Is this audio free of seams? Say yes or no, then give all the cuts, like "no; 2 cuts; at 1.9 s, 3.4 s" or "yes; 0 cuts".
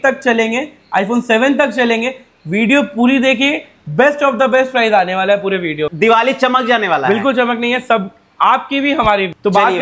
yes; 0 cuts